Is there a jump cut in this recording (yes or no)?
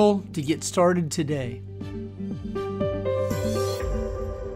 yes